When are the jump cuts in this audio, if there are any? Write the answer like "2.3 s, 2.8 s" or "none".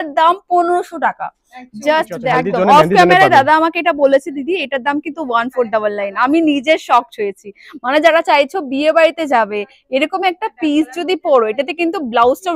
2.2 s